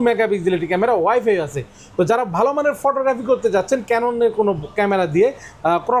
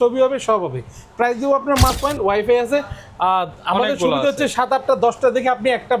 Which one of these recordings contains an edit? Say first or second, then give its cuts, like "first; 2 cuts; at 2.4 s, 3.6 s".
second; 1 cut; at 2.0 s